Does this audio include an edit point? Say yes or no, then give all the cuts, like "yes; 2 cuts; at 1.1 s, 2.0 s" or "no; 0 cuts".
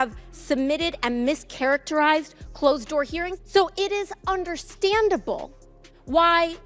yes; 1 cut; at 3.4 s